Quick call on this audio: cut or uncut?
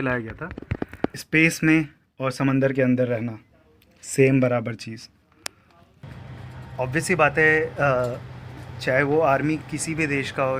cut